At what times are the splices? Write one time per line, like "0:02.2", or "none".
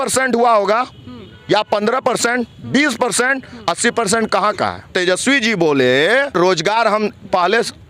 0:04.9
0:06.3